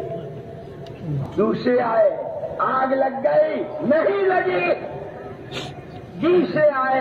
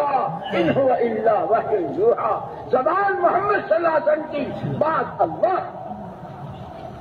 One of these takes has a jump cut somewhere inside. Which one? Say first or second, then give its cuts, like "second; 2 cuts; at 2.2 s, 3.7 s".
first; 1 cut; at 1.3 s